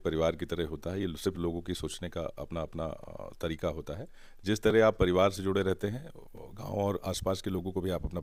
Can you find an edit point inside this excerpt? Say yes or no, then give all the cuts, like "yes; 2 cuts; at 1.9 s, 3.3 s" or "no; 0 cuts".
no; 0 cuts